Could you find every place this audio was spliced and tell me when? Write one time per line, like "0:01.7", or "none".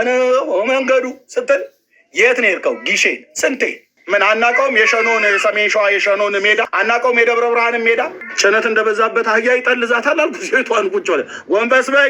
0:03.9
0:06.7
0:08.2